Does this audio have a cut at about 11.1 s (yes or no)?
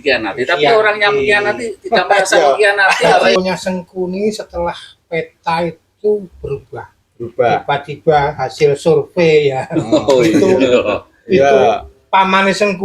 no